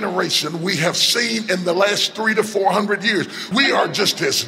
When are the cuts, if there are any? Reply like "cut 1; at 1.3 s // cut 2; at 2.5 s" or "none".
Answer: cut 1; at 3.4 s